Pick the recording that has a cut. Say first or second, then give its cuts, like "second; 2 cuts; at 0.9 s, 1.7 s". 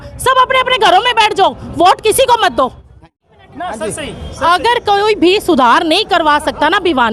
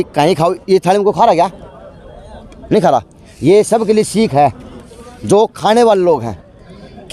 first; 1 cut; at 3.0 s